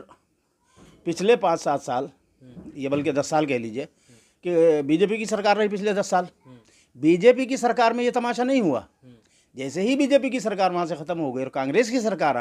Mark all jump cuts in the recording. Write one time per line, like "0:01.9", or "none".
none